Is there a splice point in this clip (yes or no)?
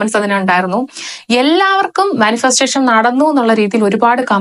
no